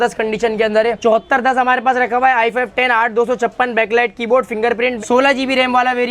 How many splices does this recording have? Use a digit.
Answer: 2